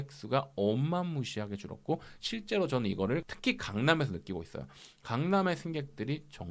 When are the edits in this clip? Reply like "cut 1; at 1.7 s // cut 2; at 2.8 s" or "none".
cut 1; at 3.3 s